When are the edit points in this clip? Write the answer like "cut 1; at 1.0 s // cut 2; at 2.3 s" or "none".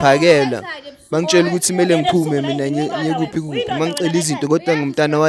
none